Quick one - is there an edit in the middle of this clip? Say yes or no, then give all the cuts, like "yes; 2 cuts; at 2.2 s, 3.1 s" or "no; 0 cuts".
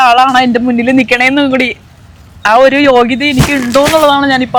no; 0 cuts